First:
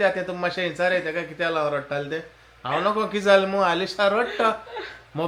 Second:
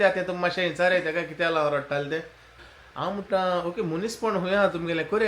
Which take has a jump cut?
second; 1 cut; at 2.5 s

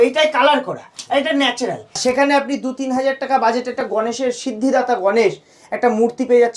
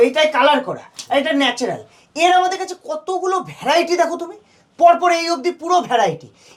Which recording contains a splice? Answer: first; 1 cut; at 1.9 s

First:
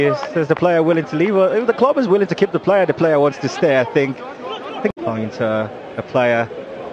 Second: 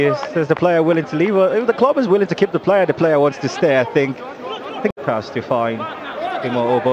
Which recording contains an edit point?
first; 1 cut; at 5.0 s

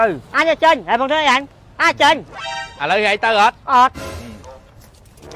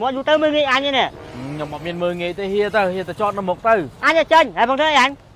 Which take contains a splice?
first; 1 cut; at 2.6 s

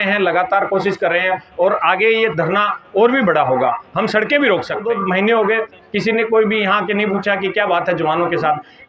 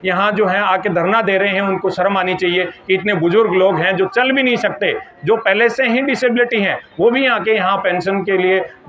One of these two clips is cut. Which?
first; 1 cut; at 4.8 s

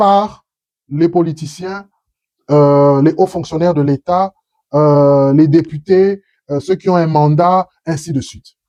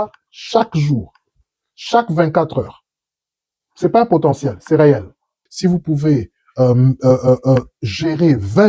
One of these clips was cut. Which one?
second; 1 cut; at 5.4 s

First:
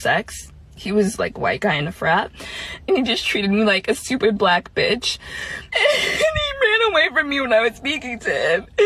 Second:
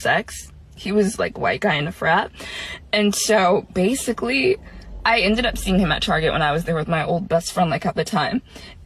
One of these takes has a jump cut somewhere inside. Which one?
first; 2 cuts; at 2.8 s, 5.7 s

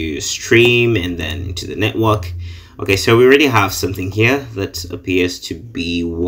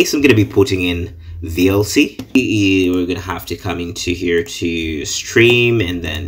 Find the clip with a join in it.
second; 1 cut; at 2.4 s

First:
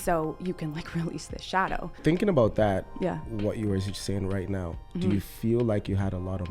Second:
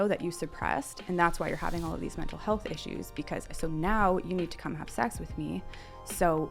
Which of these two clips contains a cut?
first; 1 cut; at 2.0 s

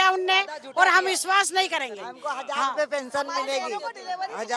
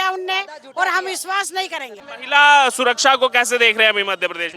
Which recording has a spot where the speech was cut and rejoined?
second; 1 cut; at 2.1 s

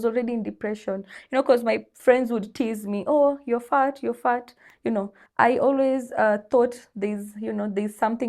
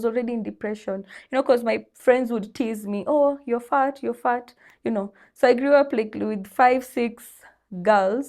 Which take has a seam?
first; 1 cut; at 5.2 s

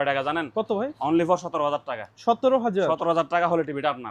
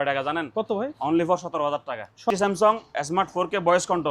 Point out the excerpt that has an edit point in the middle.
second; 1 cut; at 2.3 s

